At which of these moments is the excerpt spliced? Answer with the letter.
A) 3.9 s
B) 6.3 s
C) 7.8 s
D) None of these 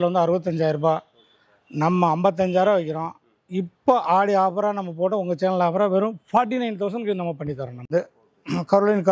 C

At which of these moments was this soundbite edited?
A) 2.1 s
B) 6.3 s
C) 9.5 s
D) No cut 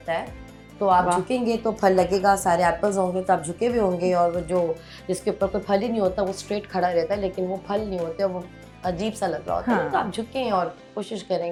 D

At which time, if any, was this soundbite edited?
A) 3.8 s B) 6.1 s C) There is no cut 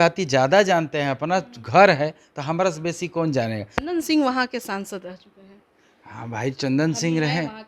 A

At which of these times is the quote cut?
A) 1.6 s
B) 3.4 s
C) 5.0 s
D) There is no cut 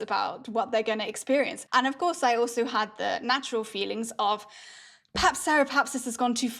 A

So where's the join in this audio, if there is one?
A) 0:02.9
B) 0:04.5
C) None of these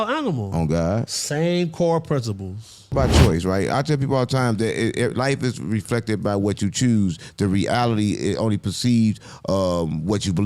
A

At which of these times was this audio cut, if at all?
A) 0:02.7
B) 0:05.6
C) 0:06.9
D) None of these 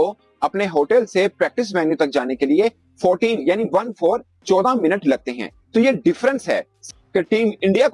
C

